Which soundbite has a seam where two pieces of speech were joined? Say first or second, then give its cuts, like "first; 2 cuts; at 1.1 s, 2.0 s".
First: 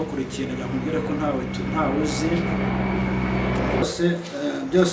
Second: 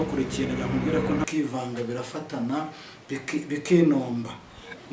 second; 1 cut; at 1.2 s